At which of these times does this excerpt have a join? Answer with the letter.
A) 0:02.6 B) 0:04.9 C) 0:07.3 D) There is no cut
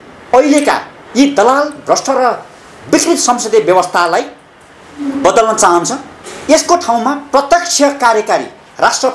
D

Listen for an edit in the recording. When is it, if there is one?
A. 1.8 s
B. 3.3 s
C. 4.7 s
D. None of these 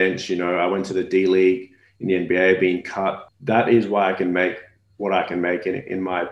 B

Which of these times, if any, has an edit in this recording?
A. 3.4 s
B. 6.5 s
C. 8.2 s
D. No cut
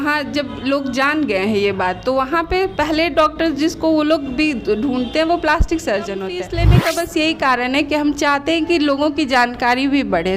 B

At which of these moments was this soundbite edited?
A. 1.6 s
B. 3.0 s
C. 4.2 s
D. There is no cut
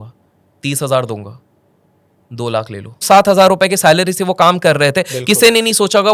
B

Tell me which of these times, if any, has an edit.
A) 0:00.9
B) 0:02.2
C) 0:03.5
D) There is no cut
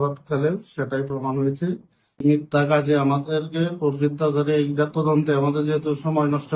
B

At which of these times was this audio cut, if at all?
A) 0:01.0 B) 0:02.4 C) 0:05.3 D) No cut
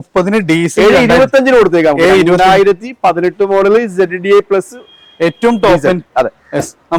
D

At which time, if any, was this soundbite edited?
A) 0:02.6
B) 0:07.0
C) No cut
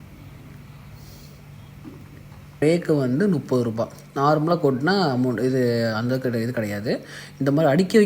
A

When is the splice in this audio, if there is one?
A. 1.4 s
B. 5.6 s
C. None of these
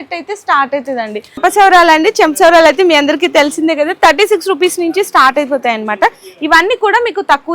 A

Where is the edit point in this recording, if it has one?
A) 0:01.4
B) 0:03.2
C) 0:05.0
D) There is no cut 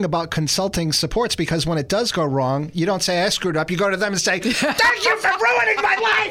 D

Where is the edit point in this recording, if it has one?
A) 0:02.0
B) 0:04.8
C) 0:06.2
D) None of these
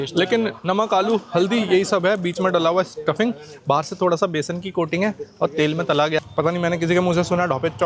C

